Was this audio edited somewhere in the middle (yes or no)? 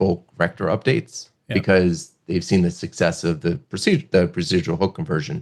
no